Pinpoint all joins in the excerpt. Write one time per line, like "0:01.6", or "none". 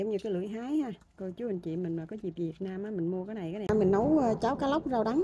0:03.7